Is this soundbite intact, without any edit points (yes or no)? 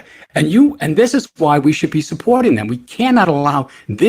no